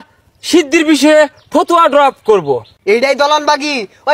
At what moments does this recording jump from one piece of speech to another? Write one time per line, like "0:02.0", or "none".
0:02.7